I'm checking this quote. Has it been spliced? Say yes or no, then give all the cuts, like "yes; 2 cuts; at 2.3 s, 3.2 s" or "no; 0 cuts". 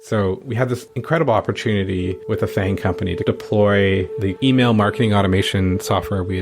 yes; 2 cuts; at 0.9 s, 2.2 s